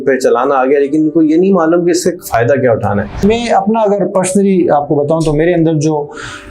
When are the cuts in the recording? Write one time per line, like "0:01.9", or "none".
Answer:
0:03.2